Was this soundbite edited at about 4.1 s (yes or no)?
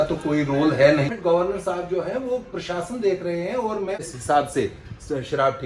yes